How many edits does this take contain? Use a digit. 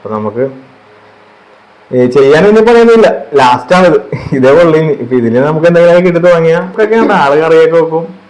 1